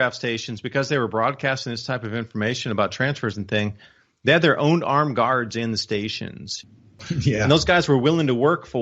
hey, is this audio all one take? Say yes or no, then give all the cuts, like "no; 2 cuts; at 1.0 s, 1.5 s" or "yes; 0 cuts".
yes; 0 cuts